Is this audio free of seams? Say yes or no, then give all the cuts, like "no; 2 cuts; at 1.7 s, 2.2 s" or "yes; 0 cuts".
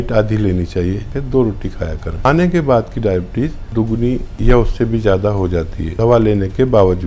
no; 4 cuts; at 1.1 s, 2.2 s, 3.9 s, 5.8 s